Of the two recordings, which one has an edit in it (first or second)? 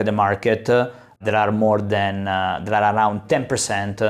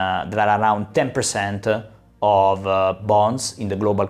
first